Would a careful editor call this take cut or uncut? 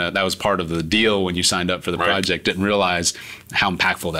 uncut